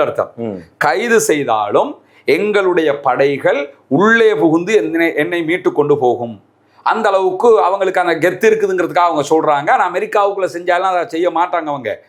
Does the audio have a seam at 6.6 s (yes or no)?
no